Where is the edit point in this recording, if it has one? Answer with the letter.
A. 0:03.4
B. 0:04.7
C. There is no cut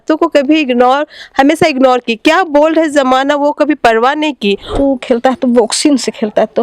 B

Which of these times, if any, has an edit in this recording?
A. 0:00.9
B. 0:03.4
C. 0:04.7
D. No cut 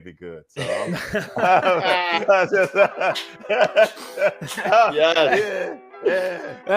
D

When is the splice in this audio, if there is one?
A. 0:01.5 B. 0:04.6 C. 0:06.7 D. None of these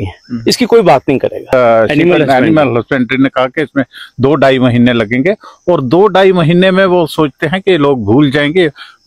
A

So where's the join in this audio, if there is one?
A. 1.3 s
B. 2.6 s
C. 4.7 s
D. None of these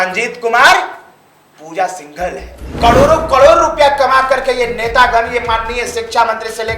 B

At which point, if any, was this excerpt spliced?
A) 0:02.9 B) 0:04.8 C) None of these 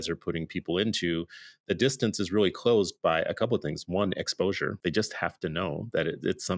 B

